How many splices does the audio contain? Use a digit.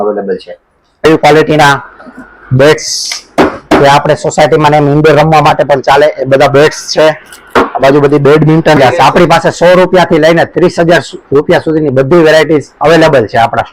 2